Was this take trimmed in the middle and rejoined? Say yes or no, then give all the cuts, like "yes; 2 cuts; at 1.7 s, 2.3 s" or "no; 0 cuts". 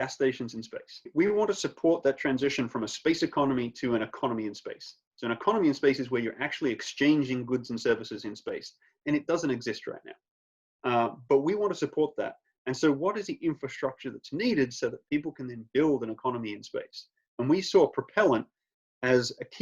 yes; 1 cut; at 1.1 s